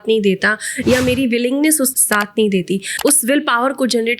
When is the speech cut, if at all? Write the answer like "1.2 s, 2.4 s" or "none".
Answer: 1.9 s, 2.9 s

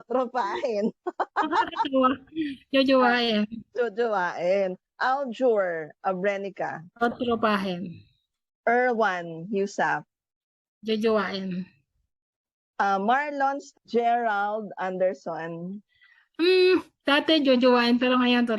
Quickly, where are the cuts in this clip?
13.7 s

